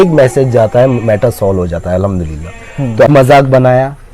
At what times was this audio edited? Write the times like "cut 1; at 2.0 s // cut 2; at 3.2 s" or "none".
cut 1; at 3.1 s